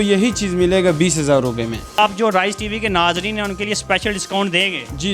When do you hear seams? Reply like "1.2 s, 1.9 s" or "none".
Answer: 2.0 s